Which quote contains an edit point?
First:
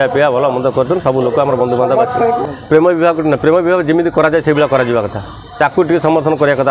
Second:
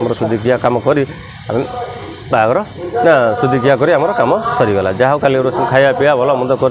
first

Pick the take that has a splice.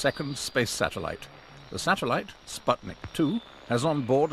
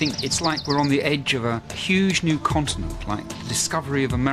second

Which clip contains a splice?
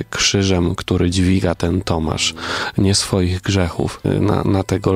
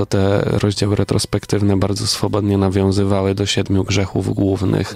first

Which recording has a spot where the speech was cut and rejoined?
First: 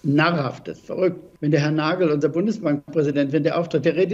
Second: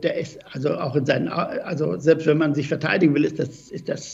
first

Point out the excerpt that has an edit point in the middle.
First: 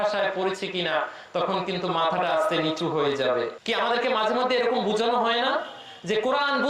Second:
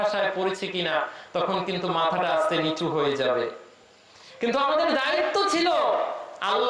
first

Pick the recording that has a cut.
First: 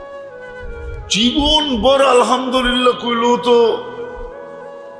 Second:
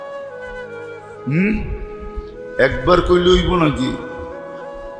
first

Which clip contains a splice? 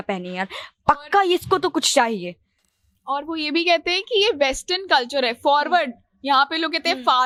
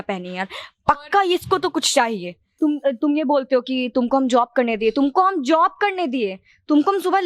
second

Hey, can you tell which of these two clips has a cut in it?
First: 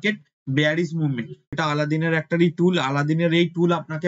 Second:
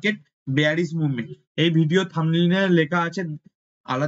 first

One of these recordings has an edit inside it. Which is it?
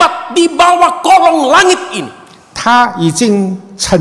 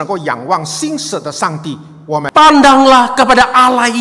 second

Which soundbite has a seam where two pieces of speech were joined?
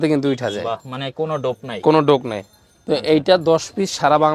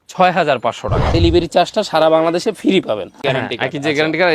second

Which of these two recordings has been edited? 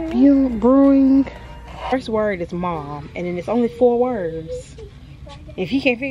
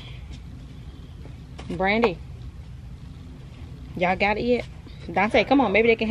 first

